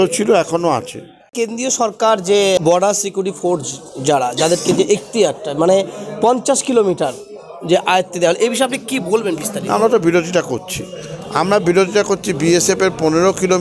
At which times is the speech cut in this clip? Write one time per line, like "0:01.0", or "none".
0:01.4
0:02.6